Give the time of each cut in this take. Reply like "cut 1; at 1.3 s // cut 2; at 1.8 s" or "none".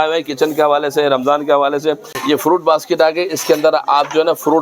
cut 1; at 2.1 s